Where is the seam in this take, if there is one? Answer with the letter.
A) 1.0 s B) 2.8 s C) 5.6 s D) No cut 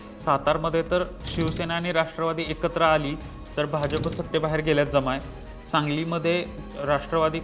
D